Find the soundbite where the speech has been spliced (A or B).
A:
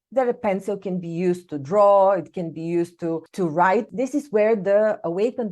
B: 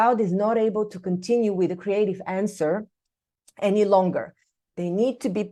A